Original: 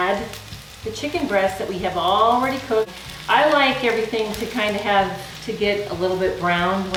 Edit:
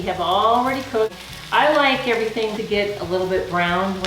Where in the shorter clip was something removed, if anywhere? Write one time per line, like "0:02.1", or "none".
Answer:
0:02.6